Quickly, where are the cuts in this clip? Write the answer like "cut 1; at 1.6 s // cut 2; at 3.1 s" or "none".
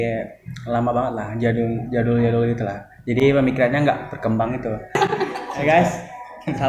cut 1; at 5.0 s